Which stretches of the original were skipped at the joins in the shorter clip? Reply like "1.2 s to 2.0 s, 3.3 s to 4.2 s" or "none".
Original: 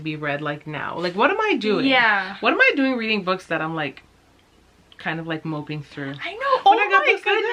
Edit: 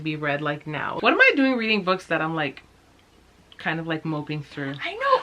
0.9 s to 2.3 s